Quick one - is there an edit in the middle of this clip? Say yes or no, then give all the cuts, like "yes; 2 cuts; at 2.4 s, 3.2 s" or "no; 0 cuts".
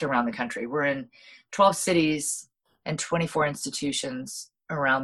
no; 0 cuts